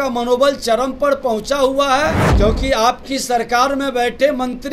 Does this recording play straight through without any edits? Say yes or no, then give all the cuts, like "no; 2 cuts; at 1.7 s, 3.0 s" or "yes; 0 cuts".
no; 1 cut; at 2.2 s